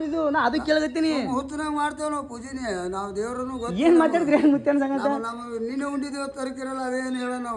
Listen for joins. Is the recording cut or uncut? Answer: uncut